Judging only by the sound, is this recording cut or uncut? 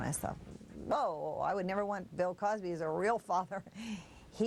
uncut